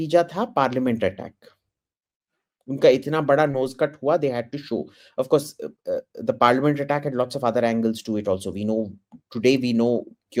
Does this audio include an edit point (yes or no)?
no